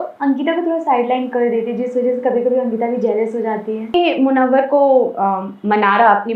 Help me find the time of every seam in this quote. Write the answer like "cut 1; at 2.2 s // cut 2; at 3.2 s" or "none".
cut 1; at 3.9 s

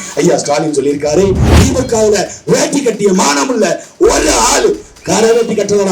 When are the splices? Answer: cut 1; at 1.5 s

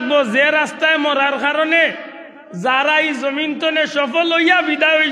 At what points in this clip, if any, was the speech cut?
none

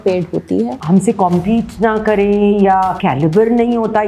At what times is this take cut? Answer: cut 1; at 0.8 s // cut 2; at 3.0 s

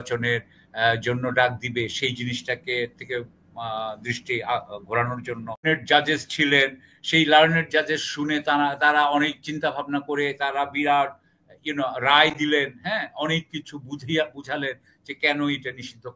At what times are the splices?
cut 1; at 5.6 s

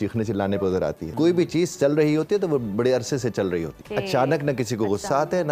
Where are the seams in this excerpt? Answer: cut 1; at 1.0 s // cut 2; at 3.8 s

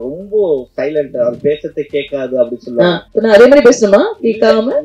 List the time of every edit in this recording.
none

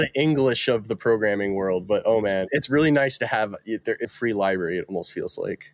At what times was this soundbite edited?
cut 1; at 2.5 s // cut 2; at 4.1 s

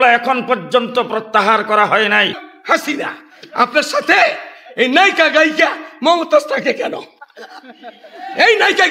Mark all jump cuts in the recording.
cut 1; at 2.5 s

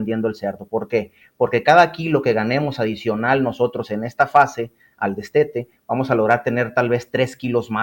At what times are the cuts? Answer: none

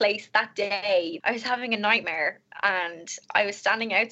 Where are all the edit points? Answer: cut 1; at 1.2 s

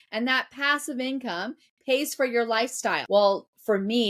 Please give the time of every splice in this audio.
cut 1; at 3.0 s

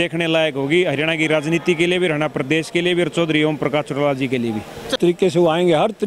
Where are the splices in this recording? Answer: cut 1; at 4.9 s

